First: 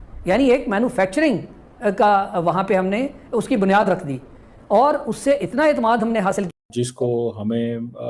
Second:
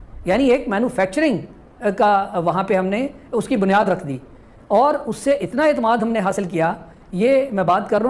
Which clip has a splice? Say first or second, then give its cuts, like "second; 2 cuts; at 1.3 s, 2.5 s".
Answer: first; 1 cut; at 6.7 s